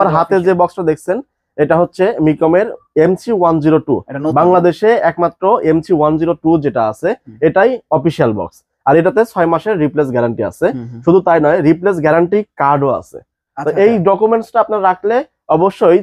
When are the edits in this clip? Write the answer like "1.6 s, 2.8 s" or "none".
none